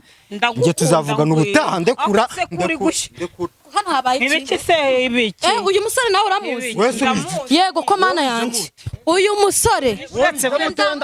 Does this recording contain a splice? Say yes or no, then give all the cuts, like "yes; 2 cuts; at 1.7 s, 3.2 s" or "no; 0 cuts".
yes; 1 cut; at 3.7 s